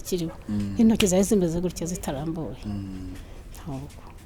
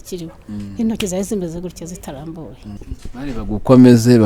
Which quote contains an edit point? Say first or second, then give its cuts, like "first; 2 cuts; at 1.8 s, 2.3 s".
second; 1 cut; at 2.8 s